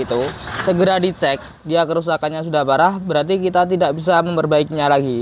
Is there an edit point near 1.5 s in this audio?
yes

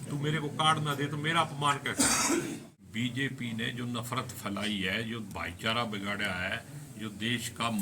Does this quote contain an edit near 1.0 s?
no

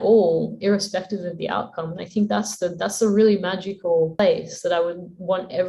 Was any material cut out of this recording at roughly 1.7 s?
no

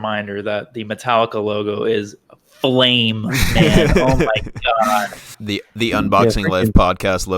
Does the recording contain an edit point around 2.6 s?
no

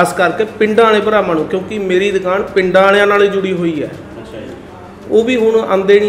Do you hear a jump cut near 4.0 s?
no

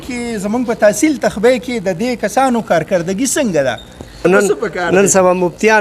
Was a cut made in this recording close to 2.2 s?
no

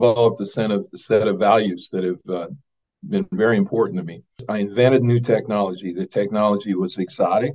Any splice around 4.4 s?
yes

